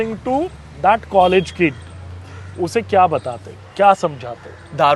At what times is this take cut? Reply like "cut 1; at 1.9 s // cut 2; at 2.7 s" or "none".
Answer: none